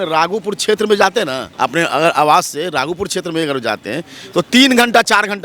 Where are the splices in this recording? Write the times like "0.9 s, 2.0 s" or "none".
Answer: 1.4 s